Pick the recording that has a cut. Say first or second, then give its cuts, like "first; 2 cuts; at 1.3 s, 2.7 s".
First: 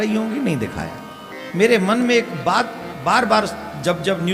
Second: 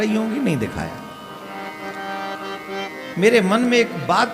first; 1 cut; at 1.3 s